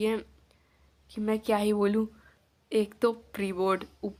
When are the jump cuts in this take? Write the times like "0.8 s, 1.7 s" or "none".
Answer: none